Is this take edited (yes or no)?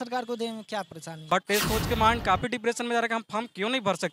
yes